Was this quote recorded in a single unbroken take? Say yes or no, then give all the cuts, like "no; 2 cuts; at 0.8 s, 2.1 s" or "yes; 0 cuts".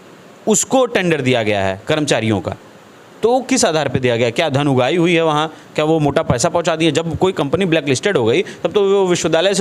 yes; 0 cuts